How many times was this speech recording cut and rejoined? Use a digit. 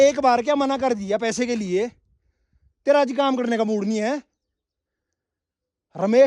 0